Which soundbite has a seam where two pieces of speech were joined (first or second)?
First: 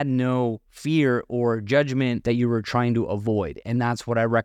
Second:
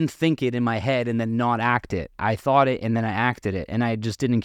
first